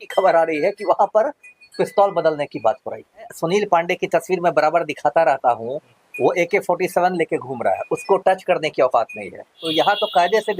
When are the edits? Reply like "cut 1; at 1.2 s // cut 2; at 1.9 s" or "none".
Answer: cut 1; at 3.3 s // cut 2; at 9.6 s